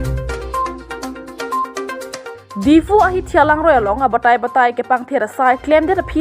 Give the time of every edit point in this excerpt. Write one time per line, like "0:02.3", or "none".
0:02.2